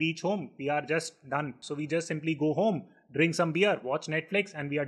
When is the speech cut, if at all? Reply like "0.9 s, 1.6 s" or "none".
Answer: 1.6 s